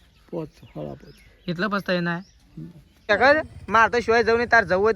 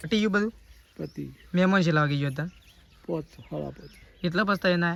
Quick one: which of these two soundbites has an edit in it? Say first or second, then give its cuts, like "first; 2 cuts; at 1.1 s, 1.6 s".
first; 1 cut; at 3.1 s